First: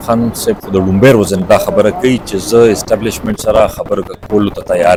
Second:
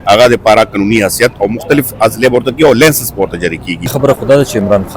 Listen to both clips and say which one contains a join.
second; 1 cut; at 3.9 s

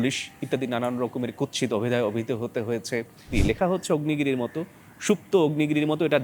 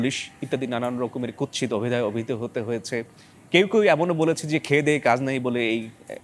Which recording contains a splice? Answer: first; 1 cut; at 3.4 s

